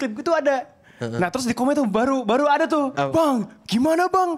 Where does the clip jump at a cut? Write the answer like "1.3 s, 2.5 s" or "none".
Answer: 2.9 s